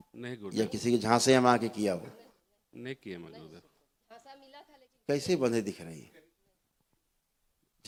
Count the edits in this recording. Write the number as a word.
zero